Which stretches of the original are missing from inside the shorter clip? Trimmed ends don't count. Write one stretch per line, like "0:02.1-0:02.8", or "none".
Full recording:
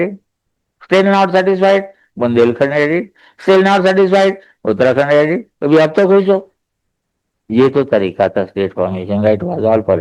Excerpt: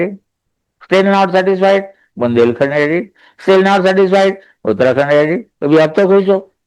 none